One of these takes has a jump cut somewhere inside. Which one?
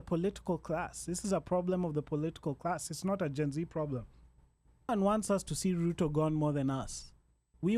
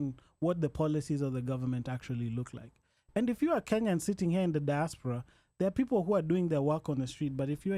first; 1 cut; at 4.9 s

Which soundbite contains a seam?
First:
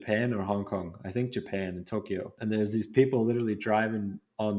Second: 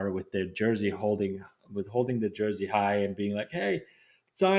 first; 1 cut; at 2.3 s

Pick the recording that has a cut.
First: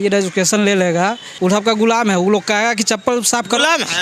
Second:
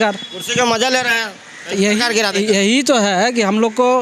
first; 1 cut; at 1.3 s

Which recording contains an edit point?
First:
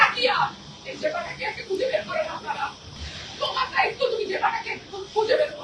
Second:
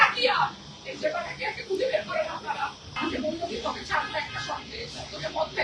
second; 1 cut; at 2.9 s

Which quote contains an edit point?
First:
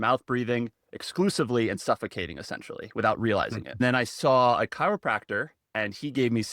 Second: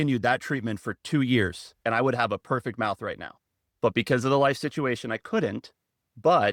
first; 1 cut; at 3.8 s

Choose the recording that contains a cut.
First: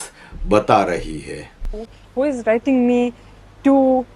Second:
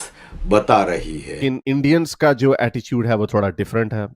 second; 1 cut; at 1.2 s

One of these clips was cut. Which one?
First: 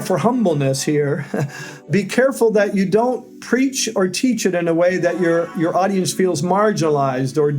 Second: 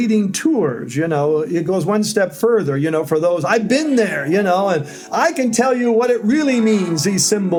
first; 2 cuts; at 1.9 s, 3.3 s

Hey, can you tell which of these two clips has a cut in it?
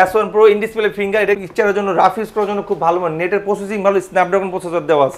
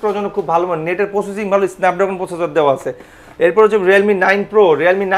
first; 1 cut; at 1.4 s

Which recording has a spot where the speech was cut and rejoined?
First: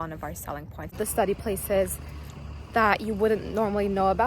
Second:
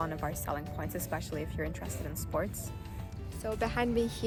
first; 1 cut; at 1.0 s

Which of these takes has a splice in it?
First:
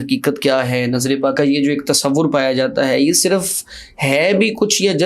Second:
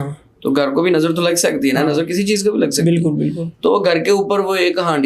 first; 1 cut; at 1.3 s

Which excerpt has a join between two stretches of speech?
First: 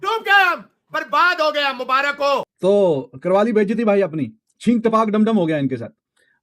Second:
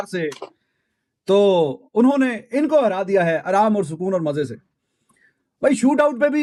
first; 1 cut; at 2.5 s

